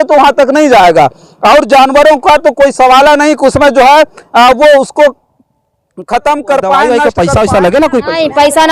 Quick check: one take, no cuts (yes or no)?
no